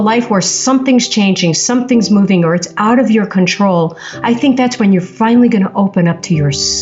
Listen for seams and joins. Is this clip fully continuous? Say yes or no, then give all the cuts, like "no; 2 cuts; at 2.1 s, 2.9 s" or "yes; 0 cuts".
yes; 0 cuts